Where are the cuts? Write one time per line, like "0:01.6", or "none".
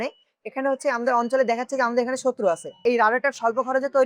0:02.8